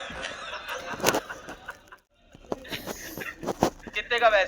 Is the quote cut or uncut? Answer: cut